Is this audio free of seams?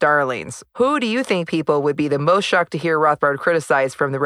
yes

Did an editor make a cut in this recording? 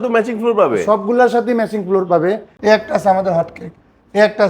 yes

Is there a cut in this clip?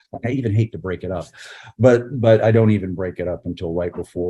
no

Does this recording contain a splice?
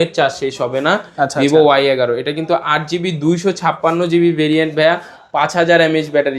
no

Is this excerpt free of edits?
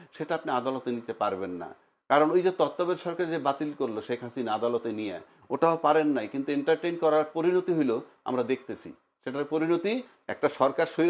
yes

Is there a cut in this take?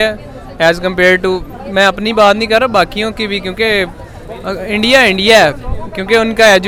no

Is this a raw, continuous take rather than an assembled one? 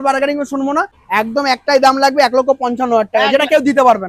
no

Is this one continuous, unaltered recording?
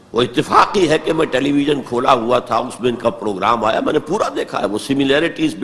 yes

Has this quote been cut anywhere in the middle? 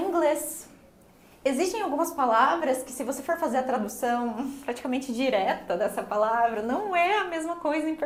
no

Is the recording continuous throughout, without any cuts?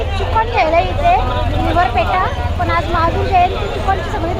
yes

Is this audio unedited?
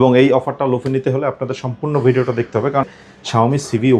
no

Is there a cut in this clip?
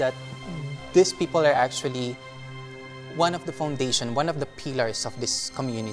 no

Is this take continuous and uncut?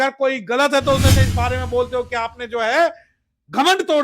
no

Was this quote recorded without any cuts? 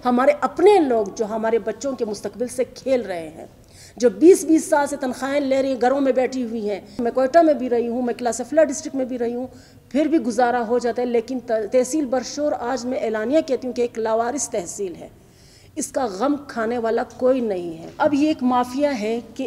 no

